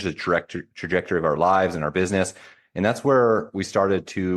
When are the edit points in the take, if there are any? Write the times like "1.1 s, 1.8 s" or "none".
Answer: none